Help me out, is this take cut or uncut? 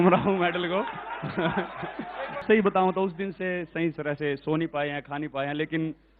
cut